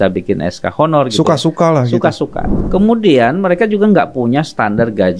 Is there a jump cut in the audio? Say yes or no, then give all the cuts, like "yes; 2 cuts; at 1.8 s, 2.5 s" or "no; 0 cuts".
yes; 1 cut; at 2.6 s